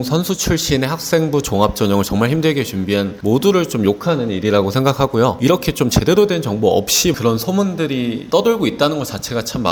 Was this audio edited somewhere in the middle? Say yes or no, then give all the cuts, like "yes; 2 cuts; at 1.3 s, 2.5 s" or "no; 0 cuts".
no; 0 cuts